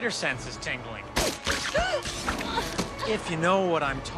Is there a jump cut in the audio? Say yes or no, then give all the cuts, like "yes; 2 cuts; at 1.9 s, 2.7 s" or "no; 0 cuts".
no; 0 cuts